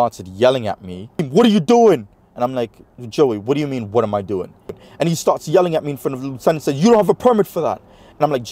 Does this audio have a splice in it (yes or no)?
yes